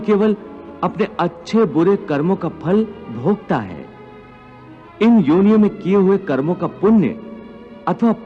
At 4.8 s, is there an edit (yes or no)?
yes